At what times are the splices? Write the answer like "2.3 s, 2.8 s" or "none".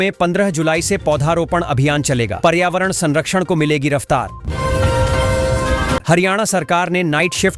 4.4 s, 6.0 s

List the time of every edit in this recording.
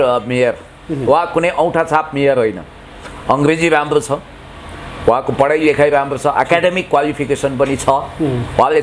none

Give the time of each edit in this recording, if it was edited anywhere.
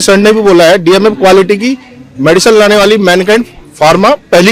none

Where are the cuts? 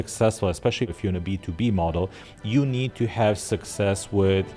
0.9 s

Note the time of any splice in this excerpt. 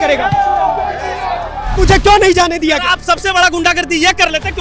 1.7 s

